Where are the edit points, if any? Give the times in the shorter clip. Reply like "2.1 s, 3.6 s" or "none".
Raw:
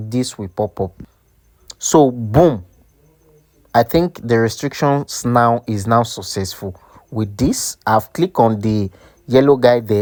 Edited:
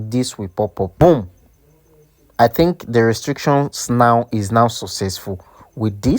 0.9 s